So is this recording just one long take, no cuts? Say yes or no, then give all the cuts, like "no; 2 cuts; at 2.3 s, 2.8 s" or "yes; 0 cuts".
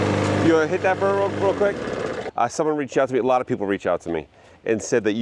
no; 1 cut; at 2.2 s